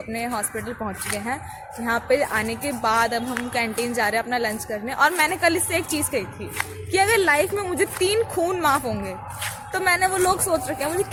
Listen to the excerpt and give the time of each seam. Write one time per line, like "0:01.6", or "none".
none